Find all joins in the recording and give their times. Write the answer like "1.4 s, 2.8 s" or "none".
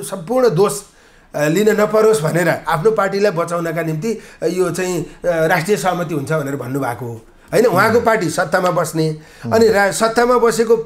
none